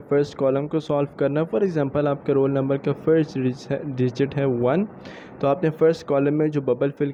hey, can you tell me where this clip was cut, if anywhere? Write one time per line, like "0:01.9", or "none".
none